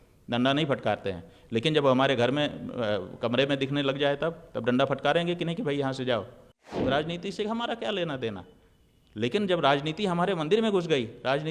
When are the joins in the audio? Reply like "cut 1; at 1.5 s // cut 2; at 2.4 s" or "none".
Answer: cut 1; at 6.7 s